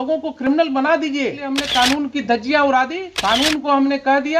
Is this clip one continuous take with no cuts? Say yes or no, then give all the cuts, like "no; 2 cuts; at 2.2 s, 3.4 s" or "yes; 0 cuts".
no; 2 cuts; at 1.5 s, 3.1 s